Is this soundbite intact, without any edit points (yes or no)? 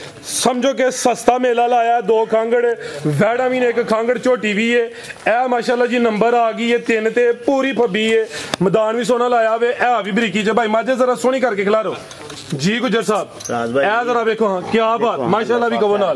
yes